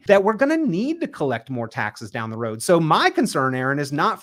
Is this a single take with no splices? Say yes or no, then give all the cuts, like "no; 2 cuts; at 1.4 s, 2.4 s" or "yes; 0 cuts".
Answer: yes; 0 cuts